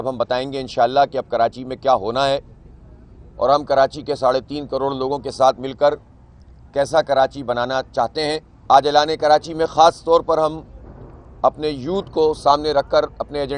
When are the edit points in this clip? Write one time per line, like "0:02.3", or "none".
0:08.5